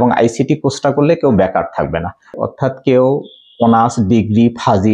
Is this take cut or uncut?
cut